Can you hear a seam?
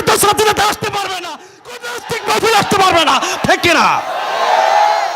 yes; 1 cut; at 3.4 s

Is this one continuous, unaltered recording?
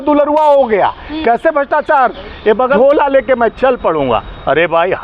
no; 1 cut; at 2.7 s

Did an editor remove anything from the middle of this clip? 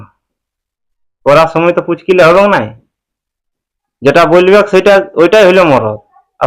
no; 0 cuts

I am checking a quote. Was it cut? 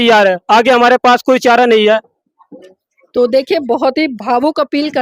no; 0 cuts

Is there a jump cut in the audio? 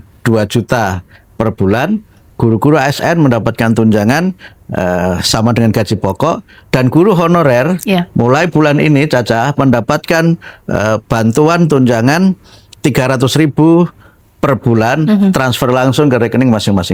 no; 0 cuts

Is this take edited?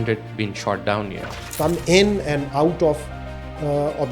yes; 1 cut; at 1.5 s

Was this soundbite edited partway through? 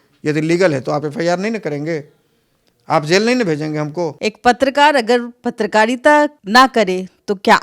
yes; 1 cut; at 4.2 s

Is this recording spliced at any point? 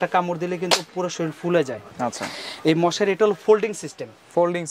no; 0 cuts

